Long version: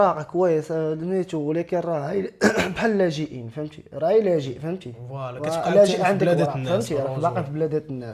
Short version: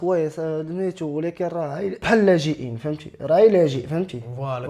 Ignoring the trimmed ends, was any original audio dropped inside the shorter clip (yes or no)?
yes